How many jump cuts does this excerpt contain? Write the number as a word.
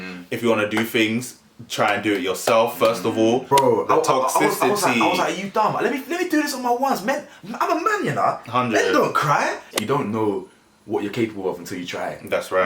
two